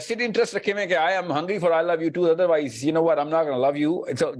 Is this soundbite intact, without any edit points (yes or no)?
yes